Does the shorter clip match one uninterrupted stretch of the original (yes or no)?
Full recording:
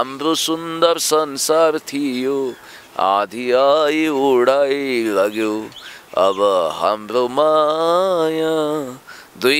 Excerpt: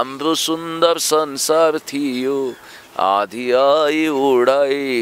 yes